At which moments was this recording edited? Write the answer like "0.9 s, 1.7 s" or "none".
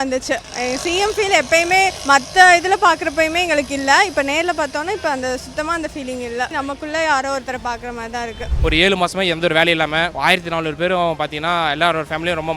2.0 s, 6.5 s, 8.5 s, 10.1 s